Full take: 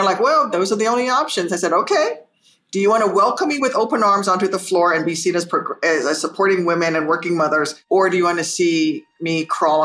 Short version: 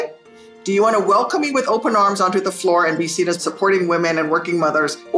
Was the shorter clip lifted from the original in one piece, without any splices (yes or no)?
no